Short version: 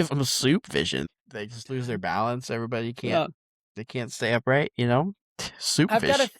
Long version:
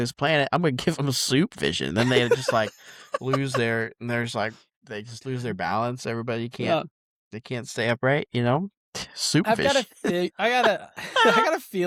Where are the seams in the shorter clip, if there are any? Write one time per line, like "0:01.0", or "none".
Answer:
0:01.0